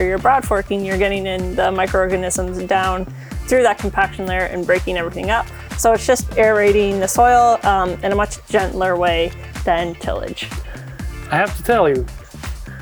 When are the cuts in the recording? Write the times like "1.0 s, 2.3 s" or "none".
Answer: none